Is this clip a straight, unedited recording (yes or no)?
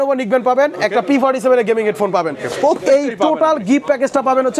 yes